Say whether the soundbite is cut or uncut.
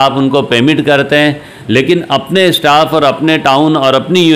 uncut